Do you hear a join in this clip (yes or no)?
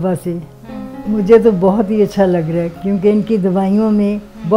yes